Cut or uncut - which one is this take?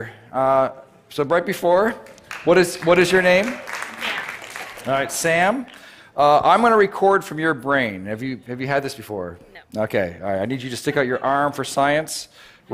cut